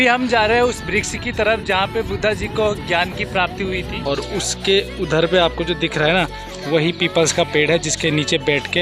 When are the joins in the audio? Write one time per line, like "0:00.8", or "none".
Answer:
0:03.9